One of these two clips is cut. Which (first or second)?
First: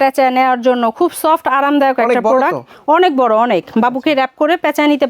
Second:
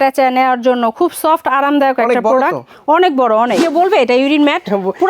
second